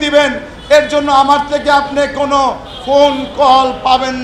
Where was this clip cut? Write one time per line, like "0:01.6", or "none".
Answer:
none